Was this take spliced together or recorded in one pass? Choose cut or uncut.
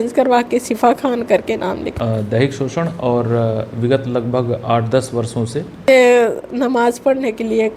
cut